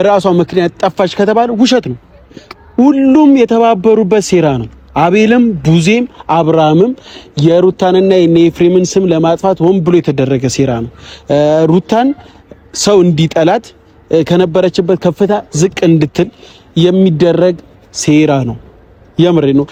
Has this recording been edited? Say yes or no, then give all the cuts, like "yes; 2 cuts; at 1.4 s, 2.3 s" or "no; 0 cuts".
no; 0 cuts